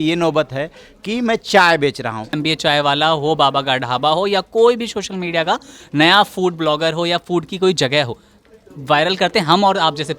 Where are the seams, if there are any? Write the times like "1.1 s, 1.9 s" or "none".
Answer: 2.4 s